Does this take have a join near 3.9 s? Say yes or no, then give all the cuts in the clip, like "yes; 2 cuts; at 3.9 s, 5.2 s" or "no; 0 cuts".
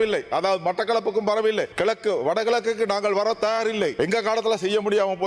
yes; 1 cut; at 3.9 s